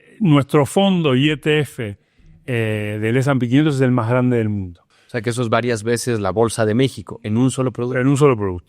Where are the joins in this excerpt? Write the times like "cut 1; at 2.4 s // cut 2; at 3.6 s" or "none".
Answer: cut 1; at 4.8 s